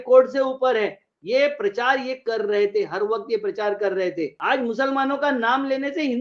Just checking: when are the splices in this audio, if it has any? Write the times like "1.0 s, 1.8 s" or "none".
4.4 s